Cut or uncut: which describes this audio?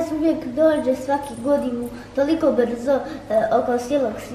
uncut